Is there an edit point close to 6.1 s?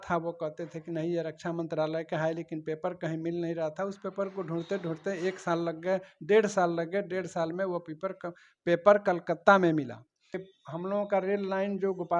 no; 1 cut; at 10.5 s

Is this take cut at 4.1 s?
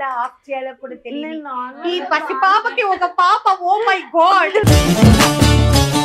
no; 0 cuts

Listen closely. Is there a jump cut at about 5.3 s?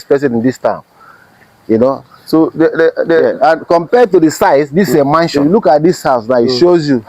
yes; 1 cut; at 5.3 s

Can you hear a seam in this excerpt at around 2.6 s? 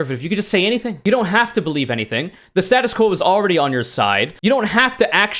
no; 2 cuts; at 0.9 s, 4.4 s

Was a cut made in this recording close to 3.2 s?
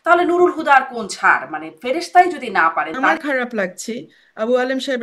yes; 1 cut; at 3.2 s

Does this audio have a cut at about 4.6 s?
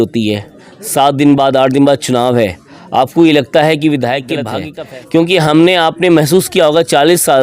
yes; 1 cut; at 4.6 s

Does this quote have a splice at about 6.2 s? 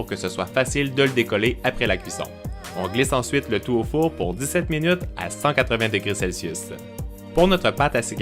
yes; 1 cut; at 6.2 s

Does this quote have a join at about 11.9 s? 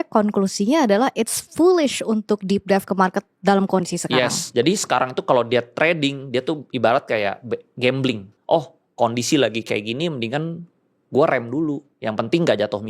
yes; 2 cuts; at 8.3 s, 11.9 s

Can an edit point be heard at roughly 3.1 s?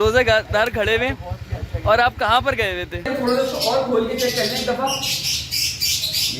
yes; 1 cut; at 3.1 s

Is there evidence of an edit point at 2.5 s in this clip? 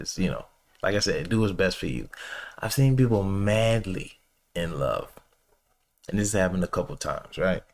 no; 0 cuts

